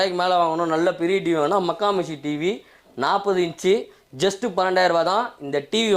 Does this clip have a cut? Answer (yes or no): no